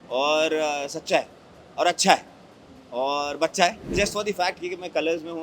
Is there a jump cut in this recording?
yes; 1 cut; at 3.9 s

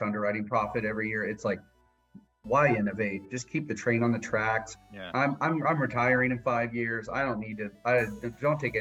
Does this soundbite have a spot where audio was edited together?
no; 0 cuts

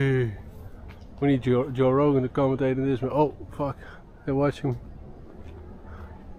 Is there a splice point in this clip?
no; 0 cuts

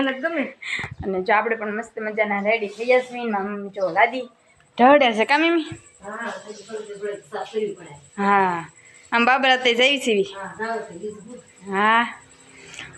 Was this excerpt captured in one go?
yes; 0 cuts

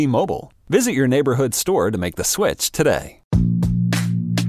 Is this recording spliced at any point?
yes; 1 cut; at 3.3 s

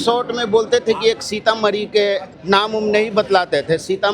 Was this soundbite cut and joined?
yes; 1 cut; at 2.3 s

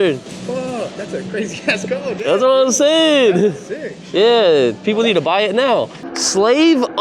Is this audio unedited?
no; 1 cut; at 6.0 s

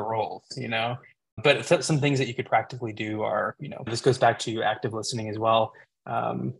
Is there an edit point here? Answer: yes; 2 cuts; at 1.4 s, 3.6 s

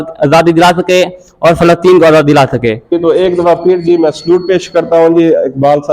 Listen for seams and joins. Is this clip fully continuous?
no; 1 cut; at 3.0 s

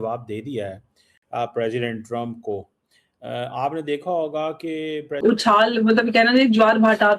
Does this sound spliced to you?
yes; 1 cut; at 5.2 s

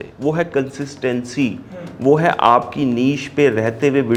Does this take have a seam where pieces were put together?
no; 0 cuts

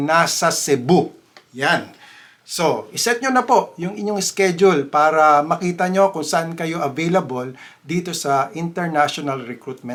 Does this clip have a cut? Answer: no; 0 cuts

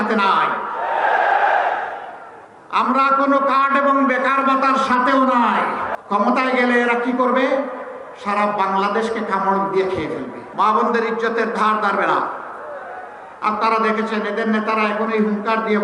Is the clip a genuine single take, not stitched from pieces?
no; 2 cuts; at 5.9 s, 10.4 s

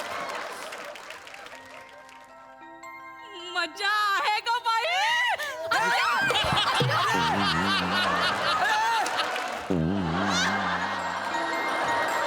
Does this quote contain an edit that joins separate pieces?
yes; 1 cut; at 9.6 s

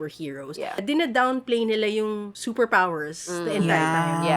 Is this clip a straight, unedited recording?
no; 2 cuts; at 0.8 s, 2.4 s

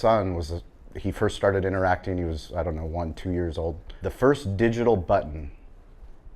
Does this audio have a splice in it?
yes; 1 cut; at 3.9 s

